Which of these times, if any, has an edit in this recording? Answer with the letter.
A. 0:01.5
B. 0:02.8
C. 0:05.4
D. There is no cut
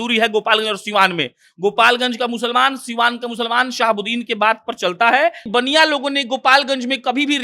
C